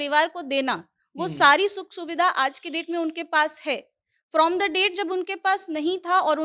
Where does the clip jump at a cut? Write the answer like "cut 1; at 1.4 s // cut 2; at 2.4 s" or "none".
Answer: none